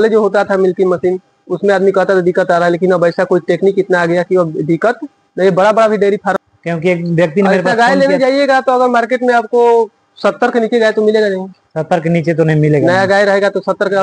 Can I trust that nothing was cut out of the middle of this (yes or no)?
no